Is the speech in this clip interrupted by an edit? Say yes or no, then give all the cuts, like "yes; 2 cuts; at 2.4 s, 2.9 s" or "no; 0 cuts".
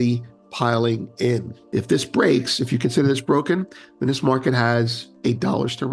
yes; 2 cuts; at 1.6 s, 5.0 s